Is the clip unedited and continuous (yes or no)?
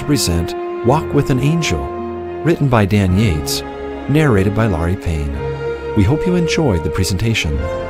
yes